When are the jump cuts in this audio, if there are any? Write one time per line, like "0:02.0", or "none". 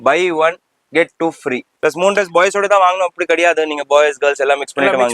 0:01.7